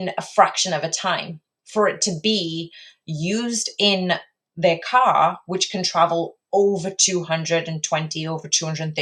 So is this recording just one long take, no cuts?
yes; 0 cuts

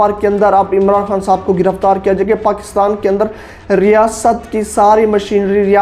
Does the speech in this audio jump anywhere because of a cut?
no; 0 cuts

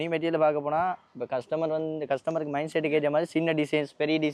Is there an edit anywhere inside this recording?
no; 0 cuts

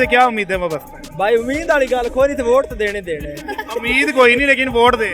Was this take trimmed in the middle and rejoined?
no; 0 cuts

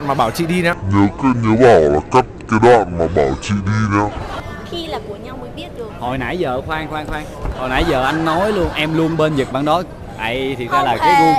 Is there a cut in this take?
yes; 1 cut; at 4.4 s

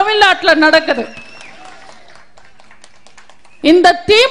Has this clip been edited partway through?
no; 0 cuts

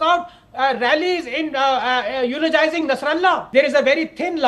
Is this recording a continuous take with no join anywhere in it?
no; 1 cut; at 3.4 s

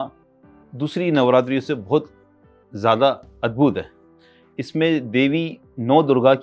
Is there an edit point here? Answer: no; 0 cuts

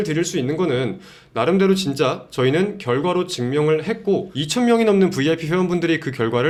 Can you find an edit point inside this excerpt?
no; 0 cuts

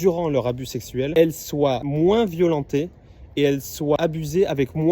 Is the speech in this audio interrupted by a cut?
yes; 3 cuts; at 1.1 s, 1.8 s, 4.0 s

